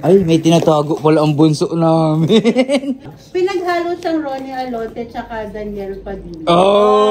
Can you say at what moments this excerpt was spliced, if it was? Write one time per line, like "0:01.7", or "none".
0:03.1

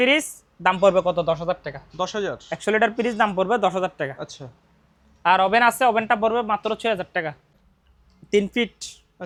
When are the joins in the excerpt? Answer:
none

